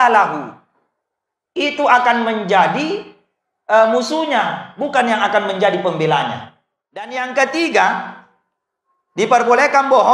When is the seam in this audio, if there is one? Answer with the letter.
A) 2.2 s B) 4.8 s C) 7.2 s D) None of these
C